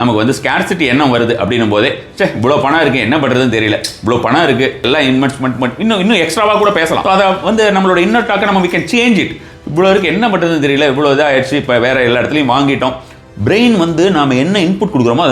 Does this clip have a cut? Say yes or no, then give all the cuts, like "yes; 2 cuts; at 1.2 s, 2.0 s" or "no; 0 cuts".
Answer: yes; 2 cuts; at 4.8 s, 7.0 s